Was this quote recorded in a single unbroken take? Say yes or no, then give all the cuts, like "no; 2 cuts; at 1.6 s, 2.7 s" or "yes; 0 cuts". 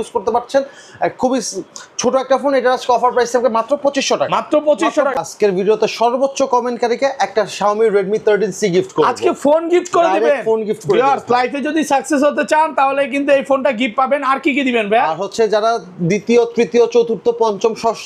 no; 1 cut; at 5.1 s